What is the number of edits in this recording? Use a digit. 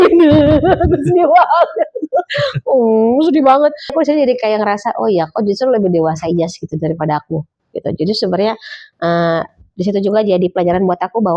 1